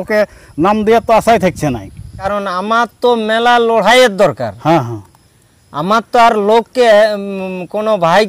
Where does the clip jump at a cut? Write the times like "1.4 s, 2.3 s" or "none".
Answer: 2.2 s